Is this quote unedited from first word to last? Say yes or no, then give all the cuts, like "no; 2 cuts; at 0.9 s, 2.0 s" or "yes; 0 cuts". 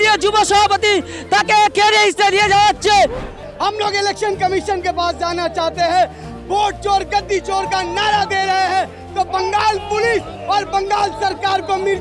no; 1 cut; at 3.4 s